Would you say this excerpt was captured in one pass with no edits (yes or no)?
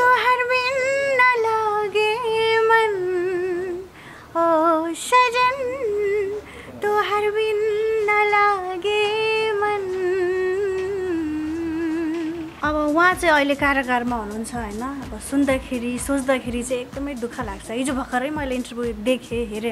no